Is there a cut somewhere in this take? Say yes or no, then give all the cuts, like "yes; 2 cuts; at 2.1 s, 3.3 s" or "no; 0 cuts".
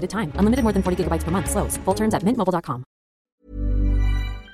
yes; 1 cut; at 3.4 s